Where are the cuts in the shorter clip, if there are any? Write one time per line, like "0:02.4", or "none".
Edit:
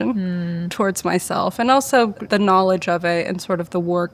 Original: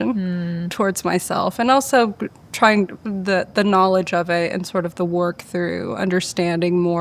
0:02.2